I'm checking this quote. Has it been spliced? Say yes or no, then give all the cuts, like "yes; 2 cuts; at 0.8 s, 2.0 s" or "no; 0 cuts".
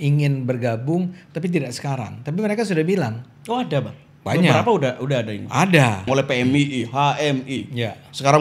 yes; 1 cut; at 6.0 s